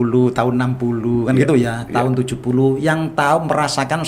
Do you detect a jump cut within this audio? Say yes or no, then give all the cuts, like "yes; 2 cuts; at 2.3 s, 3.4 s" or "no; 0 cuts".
no; 0 cuts